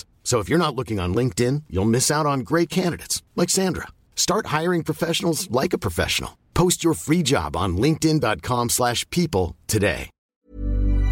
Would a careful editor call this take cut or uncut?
cut